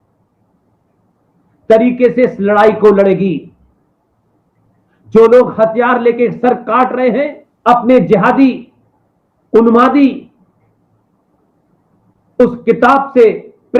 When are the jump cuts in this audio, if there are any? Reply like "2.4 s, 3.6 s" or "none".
7.4 s